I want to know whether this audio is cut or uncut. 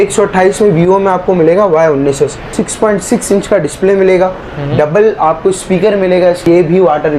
cut